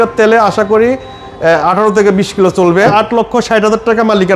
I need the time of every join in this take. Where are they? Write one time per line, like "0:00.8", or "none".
0:02.9